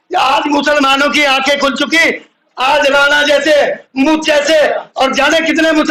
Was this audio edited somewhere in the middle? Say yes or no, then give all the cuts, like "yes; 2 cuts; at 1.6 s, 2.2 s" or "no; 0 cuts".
no; 0 cuts